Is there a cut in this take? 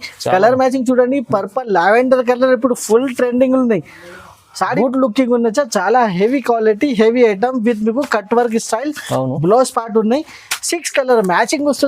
yes; 1 cut; at 4.7 s

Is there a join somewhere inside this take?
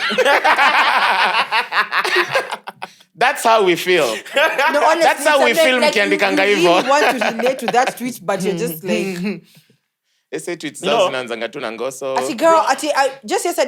no; 0 cuts

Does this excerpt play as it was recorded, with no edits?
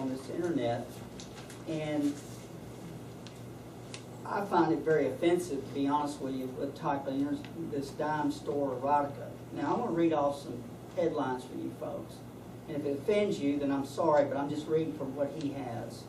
no; 1 cut; at 11.7 s

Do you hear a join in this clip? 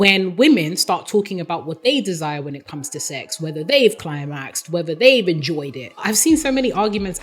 yes; 1 cut; at 6.0 s

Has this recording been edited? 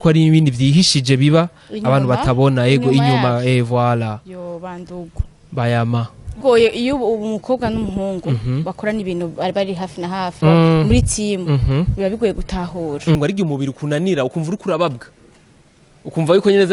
yes; 2 cuts; at 6.4 s, 13.2 s

